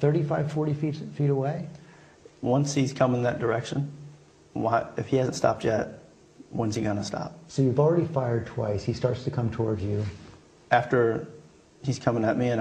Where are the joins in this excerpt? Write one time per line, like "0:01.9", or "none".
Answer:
0:08.5

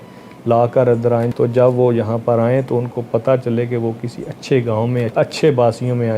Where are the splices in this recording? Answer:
0:01.3
0:05.1

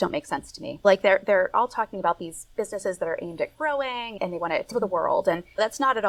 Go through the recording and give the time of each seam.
none

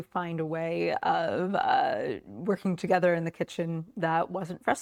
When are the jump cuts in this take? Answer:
none

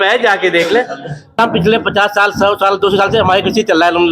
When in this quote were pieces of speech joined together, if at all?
0:01.4

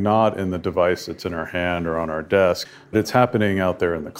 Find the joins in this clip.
0:02.6

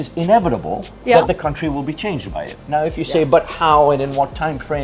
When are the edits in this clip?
none

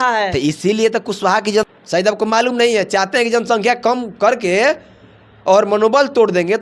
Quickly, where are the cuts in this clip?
0:01.7

